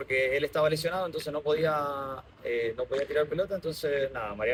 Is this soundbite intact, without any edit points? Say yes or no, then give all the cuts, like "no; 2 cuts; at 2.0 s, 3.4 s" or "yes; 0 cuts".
yes; 0 cuts